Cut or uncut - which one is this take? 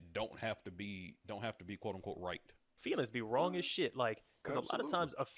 cut